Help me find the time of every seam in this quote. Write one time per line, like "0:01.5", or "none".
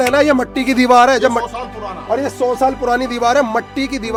none